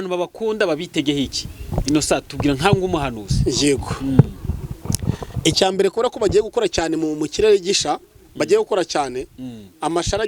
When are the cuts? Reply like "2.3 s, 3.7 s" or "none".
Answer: none